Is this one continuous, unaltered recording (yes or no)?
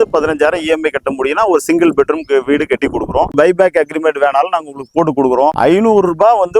no